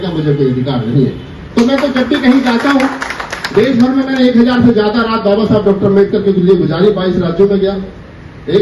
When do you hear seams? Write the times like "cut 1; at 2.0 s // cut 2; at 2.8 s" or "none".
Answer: none